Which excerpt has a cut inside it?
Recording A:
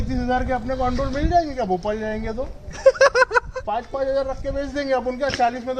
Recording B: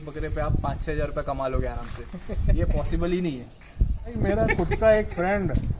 B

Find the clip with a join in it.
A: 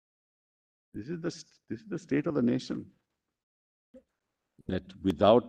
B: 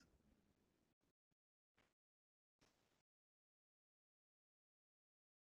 A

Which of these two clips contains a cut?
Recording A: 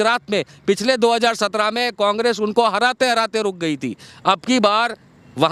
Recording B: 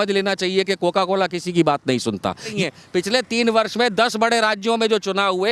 B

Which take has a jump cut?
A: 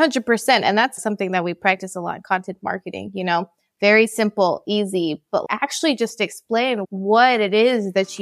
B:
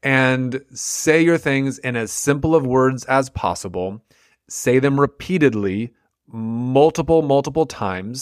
A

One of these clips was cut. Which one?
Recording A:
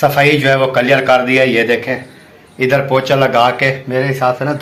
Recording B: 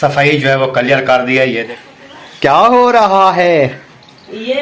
B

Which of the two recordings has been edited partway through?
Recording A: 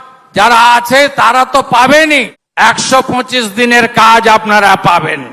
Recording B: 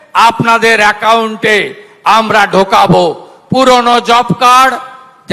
A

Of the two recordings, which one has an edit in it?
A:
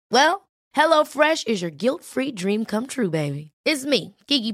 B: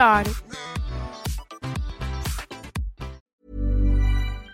B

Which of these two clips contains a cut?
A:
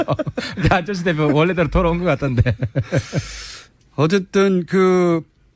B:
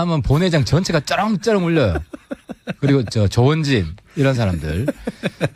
A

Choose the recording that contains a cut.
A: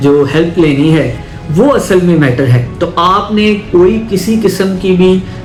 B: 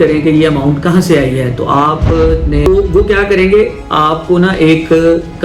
B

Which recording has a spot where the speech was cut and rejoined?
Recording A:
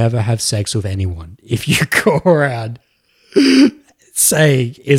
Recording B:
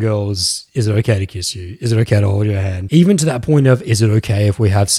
B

